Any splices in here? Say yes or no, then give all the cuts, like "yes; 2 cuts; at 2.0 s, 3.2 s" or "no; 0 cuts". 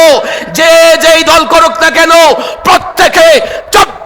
no; 0 cuts